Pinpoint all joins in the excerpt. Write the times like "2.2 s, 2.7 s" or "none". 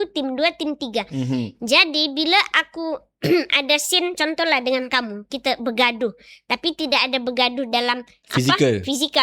8.2 s